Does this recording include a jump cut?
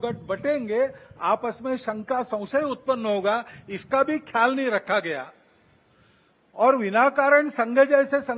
no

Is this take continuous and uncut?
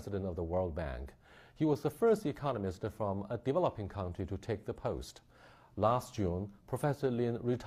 no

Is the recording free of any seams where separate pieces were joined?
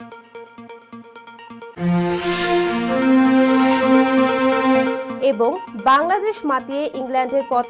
no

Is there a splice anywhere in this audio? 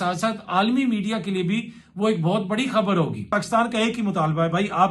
yes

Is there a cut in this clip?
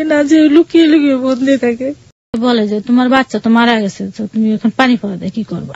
yes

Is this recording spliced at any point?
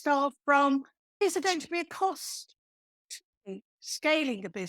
yes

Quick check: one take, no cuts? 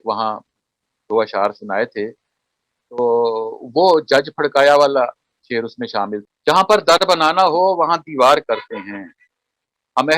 no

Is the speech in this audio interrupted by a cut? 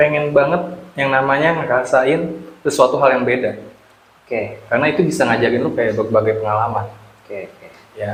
no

